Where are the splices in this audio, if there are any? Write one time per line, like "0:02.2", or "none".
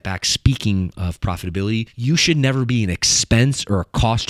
0:01.9